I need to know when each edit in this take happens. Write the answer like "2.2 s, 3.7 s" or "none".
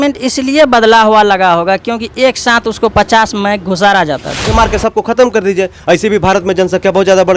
4.5 s